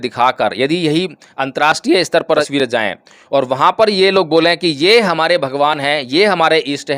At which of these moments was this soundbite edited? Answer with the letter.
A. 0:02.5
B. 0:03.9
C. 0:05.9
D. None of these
A